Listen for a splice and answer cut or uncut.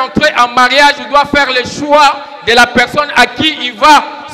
uncut